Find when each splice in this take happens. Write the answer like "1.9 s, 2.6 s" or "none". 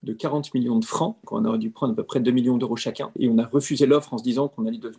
1.2 s, 3.1 s